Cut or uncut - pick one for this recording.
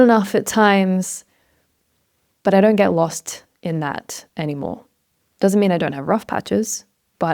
uncut